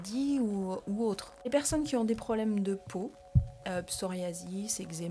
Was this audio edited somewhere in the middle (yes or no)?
yes